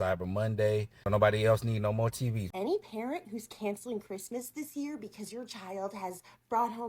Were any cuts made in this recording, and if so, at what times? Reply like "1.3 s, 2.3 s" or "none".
1.0 s, 2.4 s